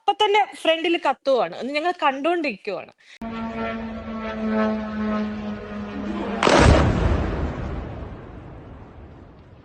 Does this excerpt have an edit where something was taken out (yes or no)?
no